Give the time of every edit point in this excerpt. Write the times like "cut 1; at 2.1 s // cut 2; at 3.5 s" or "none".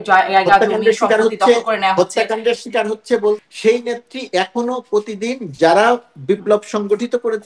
cut 1; at 3.4 s